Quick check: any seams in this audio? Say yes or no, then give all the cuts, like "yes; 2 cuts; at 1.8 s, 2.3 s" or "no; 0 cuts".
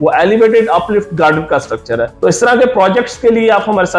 yes; 1 cut; at 2.1 s